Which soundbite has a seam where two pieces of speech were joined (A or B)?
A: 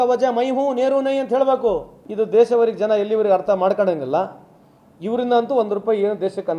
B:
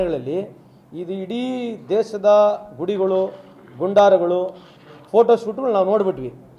A